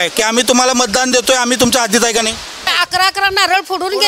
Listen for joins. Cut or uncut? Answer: cut